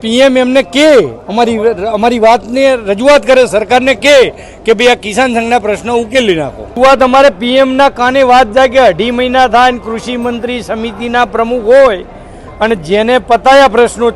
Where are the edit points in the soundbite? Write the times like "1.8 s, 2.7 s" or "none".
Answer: 6.7 s